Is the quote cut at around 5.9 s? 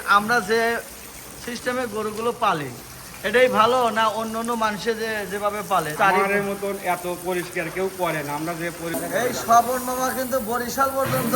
yes; 2 cuts; at 5.9 s, 8.9 s

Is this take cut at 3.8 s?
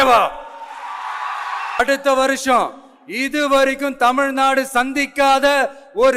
no; 1 cut; at 1.8 s

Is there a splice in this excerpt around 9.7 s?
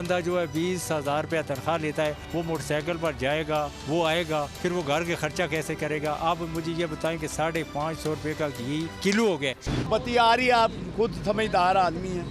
yes; 1 cut; at 9.7 s

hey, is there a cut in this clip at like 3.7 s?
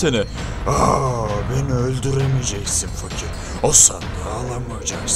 no; 0 cuts

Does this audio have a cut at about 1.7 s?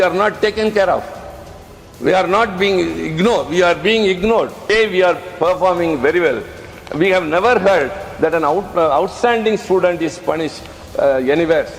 no; 1 cut; at 4.7 s

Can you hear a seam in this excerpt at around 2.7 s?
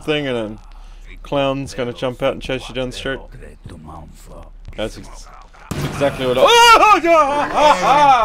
no; 1 cut; at 4.6 s

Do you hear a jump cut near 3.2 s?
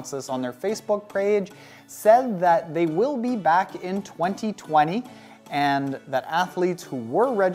yes; 1 cut; at 3.2 s

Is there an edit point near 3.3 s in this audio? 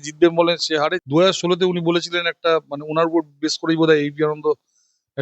no; 1 cut; at 1.0 s

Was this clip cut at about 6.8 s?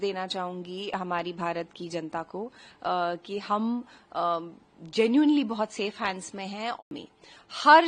yes; 1 cut; at 6.8 s

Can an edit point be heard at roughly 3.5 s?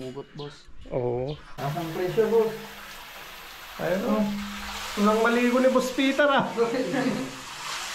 no; 1 cut; at 1.5 s

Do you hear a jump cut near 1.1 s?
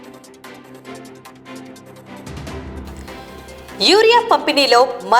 yes; 1 cut; at 1.1 s

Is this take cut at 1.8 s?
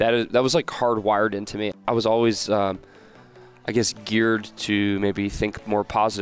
yes; 1 cut; at 1.8 s

